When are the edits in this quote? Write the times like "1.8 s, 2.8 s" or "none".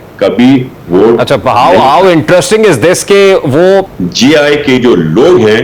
3.9 s